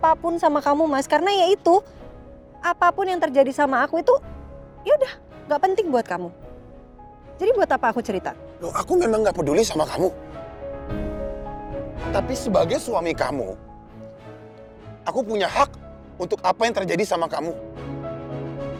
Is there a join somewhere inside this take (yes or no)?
no